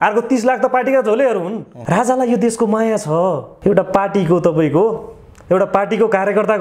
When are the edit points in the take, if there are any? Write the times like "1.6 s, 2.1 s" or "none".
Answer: 1.7 s, 3.5 s

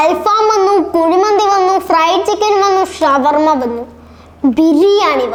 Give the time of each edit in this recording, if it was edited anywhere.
none

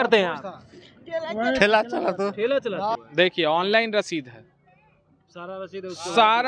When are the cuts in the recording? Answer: 3.0 s

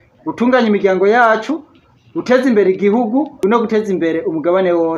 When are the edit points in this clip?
3.3 s

